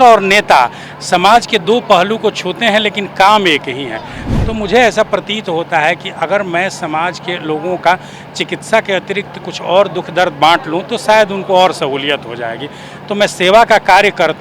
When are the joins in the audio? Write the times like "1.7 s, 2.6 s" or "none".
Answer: 4.2 s